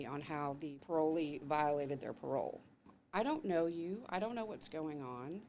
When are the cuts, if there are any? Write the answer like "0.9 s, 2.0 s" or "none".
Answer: 0.8 s, 2.9 s

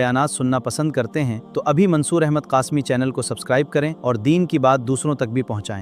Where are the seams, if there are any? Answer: none

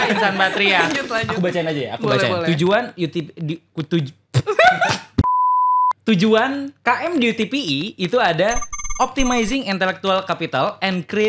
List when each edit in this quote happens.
1.2 s

